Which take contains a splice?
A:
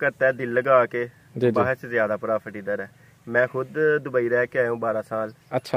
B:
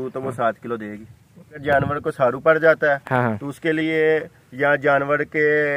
B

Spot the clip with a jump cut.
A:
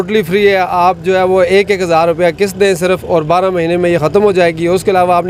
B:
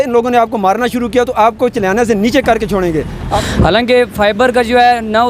B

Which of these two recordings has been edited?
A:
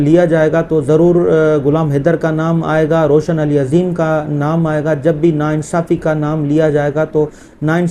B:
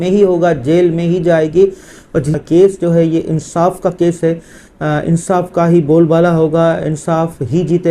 B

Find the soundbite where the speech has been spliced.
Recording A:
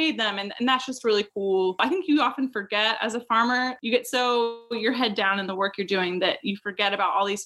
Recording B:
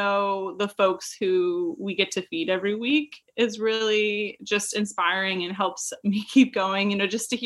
A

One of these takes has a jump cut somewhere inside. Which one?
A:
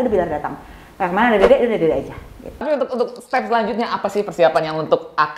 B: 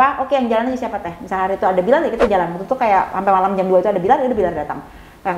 A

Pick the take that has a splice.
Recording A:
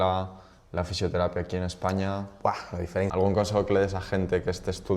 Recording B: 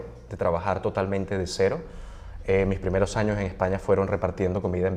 A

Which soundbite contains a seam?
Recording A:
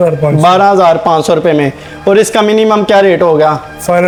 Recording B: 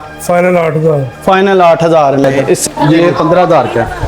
B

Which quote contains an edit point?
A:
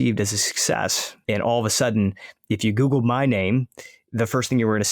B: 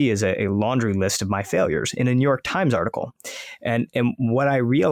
A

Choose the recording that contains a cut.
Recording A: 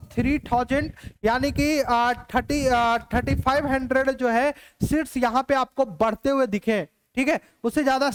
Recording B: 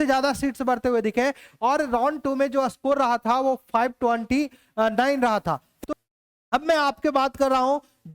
B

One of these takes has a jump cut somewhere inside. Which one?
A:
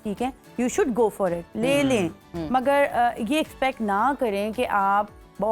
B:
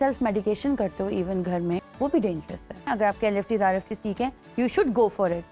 B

